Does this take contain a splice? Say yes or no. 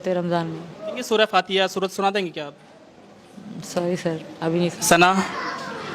yes